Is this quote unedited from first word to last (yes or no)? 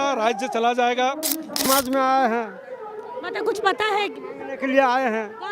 no